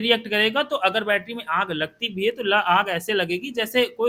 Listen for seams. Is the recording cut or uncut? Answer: uncut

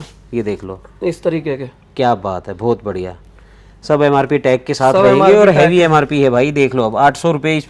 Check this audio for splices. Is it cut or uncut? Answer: uncut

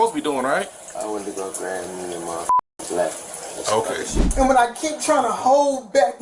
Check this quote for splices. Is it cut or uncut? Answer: cut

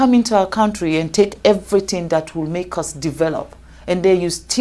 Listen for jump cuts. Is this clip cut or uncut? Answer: uncut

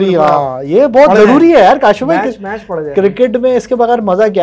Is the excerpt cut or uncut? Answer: uncut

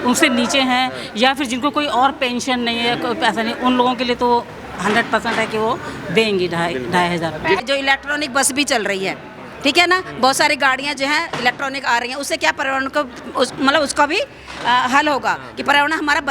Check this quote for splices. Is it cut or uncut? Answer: cut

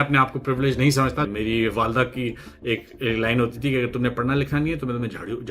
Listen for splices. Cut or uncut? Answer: cut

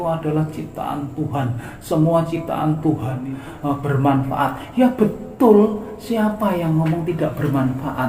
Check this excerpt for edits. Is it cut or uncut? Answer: cut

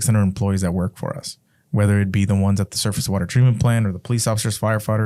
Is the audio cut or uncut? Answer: uncut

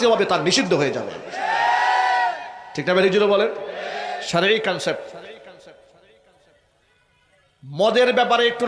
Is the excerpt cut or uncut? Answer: uncut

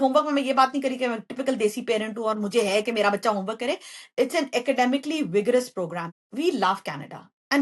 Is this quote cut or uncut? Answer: cut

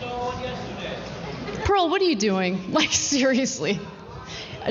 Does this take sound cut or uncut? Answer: uncut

